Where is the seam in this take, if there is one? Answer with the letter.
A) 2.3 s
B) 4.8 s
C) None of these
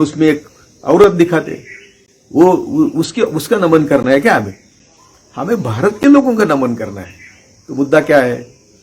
C